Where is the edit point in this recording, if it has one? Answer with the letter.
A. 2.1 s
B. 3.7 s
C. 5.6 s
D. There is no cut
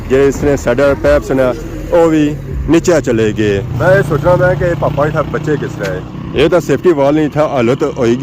B